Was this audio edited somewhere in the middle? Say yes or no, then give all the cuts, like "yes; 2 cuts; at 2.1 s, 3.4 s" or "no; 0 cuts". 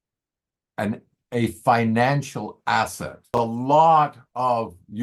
yes; 1 cut; at 3.3 s